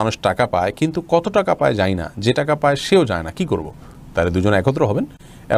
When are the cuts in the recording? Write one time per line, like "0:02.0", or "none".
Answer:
none